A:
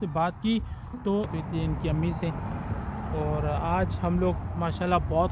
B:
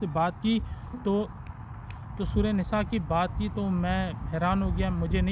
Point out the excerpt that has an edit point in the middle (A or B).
A